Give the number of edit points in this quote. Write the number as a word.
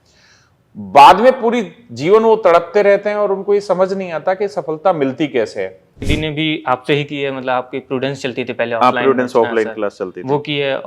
one